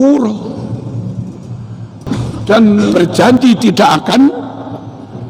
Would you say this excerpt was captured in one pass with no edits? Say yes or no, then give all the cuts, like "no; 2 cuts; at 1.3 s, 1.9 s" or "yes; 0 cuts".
no; 1 cut; at 2.9 s